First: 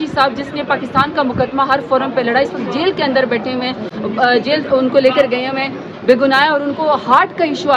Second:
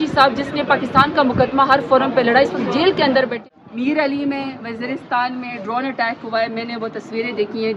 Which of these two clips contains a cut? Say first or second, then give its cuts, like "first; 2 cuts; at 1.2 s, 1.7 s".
second; 1 cut; at 3.4 s